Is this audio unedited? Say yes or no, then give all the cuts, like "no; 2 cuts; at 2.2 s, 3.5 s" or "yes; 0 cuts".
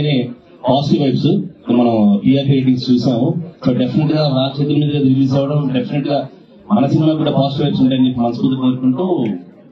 yes; 0 cuts